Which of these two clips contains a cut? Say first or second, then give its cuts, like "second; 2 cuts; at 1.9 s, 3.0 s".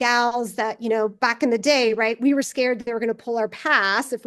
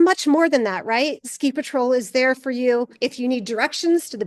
second; 2 cuts; at 1.2 s, 2.9 s